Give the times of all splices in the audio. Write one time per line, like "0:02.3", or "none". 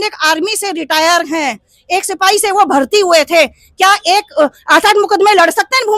none